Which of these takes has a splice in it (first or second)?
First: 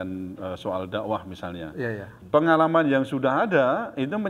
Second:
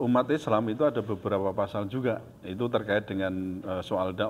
first